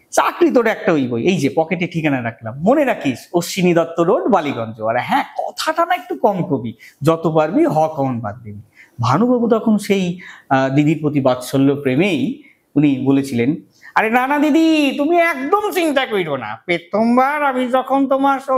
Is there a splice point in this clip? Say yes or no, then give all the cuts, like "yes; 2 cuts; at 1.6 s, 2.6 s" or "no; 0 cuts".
no; 0 cuts